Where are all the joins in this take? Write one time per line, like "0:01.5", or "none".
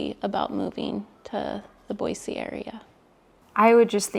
none

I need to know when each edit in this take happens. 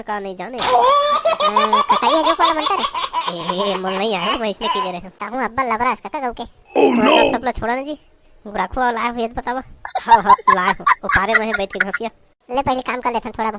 none

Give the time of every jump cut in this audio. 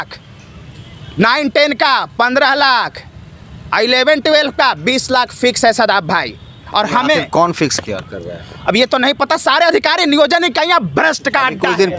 none

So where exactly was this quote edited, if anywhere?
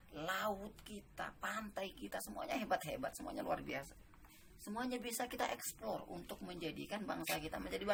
none

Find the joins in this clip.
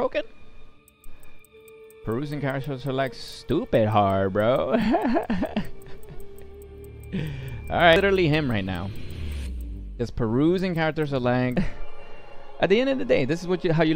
0:08.0
0:11.5

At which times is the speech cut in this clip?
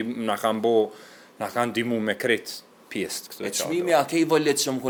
none

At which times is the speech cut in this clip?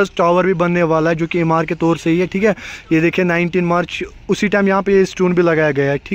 none

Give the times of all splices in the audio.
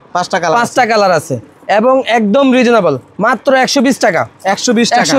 none

